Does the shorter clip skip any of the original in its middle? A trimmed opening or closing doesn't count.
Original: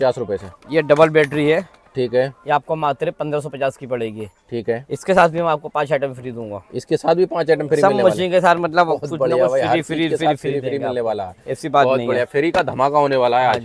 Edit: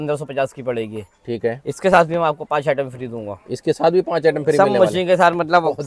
no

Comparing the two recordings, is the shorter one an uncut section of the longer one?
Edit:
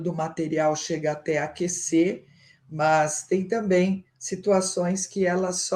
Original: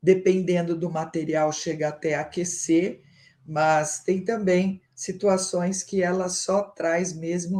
yes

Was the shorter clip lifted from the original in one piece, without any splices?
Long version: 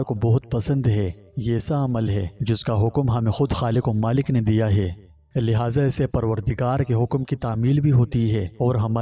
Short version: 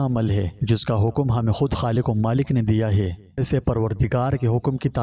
no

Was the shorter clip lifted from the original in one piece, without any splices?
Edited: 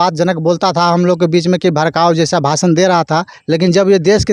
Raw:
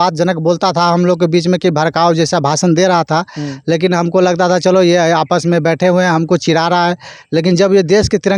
no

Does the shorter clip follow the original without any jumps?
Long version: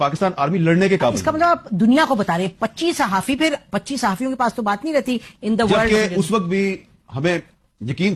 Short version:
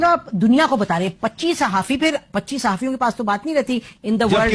yes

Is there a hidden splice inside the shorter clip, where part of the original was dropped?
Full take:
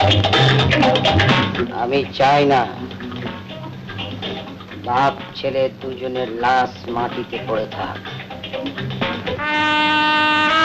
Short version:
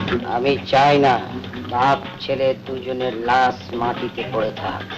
yes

